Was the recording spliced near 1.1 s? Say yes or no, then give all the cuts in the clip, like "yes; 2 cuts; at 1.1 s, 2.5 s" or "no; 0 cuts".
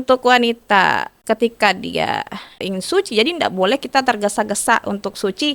yes; 2 cuts; at 1.1 s, 2.6 s